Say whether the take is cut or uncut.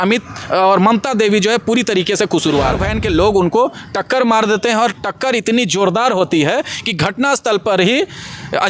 cut